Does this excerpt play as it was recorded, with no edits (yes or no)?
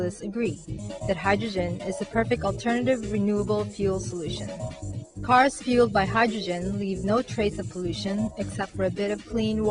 no